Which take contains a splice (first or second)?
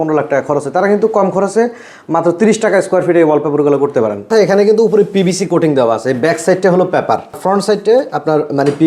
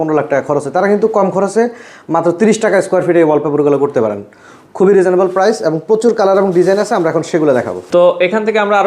first